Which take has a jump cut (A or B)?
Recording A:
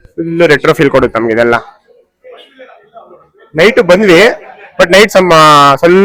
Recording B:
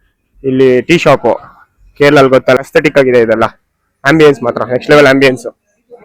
B